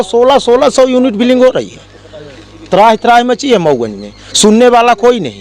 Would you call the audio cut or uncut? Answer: uncut